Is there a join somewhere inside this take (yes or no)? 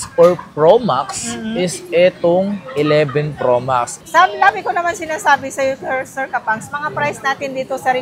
yes